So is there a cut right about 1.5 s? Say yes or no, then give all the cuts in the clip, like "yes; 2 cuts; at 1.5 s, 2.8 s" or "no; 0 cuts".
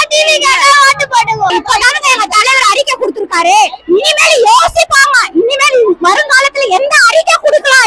yes; 1 cut; at 1.5 s